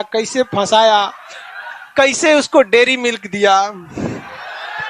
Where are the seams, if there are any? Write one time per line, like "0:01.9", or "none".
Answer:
none